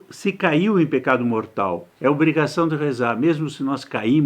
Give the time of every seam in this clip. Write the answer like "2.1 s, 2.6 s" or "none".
1.9 s